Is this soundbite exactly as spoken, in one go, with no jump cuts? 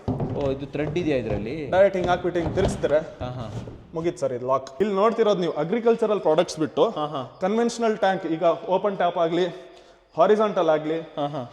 no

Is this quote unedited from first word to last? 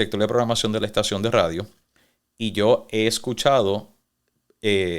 yes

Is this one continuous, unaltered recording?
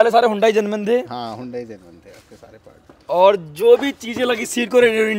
yes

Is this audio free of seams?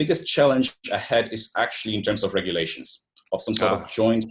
yes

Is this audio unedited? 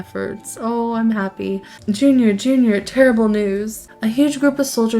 no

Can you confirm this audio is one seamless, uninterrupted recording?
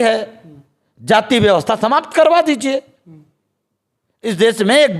yes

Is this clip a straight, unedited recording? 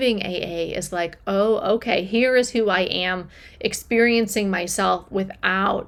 yes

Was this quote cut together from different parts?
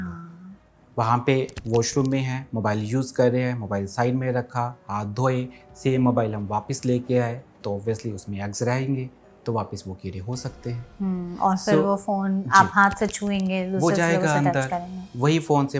no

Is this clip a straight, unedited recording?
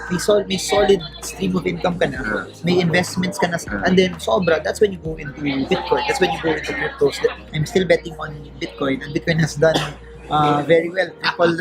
no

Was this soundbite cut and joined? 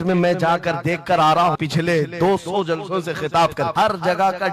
yes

